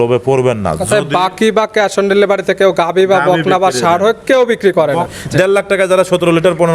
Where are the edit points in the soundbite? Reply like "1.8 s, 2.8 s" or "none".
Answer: 5.1 s